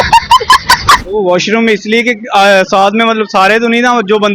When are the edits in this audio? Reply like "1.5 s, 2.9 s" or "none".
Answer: 1.1 s